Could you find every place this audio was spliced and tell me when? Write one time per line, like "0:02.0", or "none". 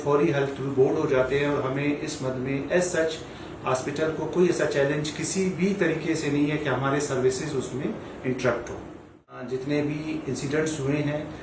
0:09.5